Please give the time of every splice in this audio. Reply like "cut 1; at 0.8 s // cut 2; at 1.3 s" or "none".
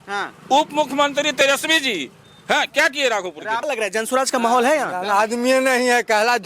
cut 1; at 3.6 s